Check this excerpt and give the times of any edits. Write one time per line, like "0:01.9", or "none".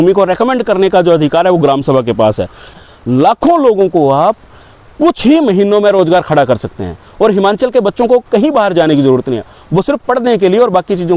0:02.9